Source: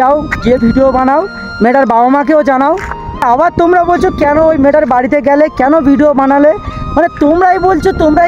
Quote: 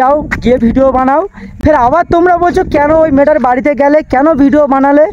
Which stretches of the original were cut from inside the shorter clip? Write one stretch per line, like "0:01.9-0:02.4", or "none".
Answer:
0:01.4-0:02.9